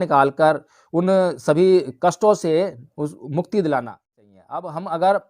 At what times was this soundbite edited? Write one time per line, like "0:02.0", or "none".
0:04.0